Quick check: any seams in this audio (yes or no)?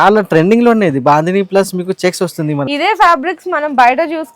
yes